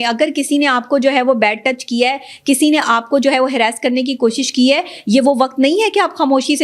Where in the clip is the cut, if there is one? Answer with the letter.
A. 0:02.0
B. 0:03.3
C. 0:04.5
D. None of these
D